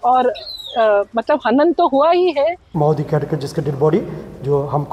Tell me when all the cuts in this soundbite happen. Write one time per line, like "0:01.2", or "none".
0:02.6